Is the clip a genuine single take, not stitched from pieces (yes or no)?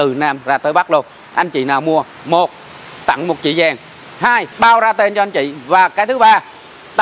no